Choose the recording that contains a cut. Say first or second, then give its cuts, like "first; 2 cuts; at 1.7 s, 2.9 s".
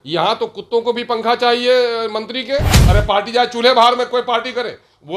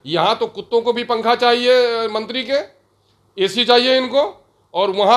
first; 1 cut; at 2.8 s